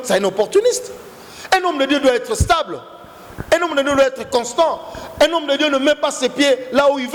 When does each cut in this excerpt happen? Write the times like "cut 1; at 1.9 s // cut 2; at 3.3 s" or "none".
none